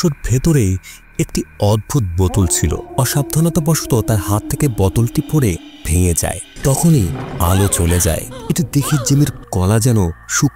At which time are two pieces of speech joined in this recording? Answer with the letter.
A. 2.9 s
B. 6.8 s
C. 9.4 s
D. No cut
A